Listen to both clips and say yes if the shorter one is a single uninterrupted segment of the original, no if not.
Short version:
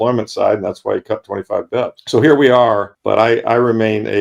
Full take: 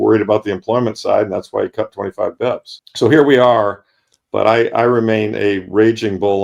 no